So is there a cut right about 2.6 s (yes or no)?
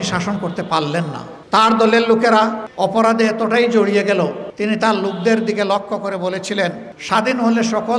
yes